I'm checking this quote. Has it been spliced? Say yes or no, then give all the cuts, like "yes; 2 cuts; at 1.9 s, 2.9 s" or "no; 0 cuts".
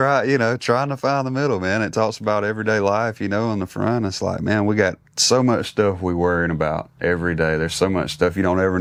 no; 0 cuts